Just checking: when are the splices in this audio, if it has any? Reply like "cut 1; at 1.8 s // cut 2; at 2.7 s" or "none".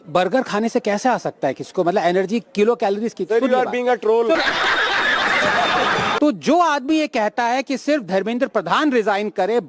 cut 1; at 4.4 s // cut 2; at 6.2 s